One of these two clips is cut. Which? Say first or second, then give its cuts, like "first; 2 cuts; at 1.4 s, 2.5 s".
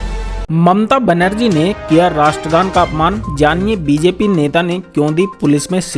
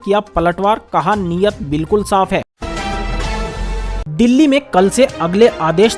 second; 2 cuts; at 2.6 s, 3.8 s